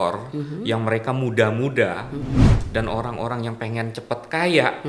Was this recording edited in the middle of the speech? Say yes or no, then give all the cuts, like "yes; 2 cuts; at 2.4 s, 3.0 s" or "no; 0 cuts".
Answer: yes; 1 cut; at 2.5 s